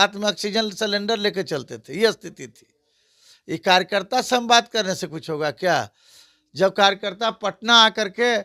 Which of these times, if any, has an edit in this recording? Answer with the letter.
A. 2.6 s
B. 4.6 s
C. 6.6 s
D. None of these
D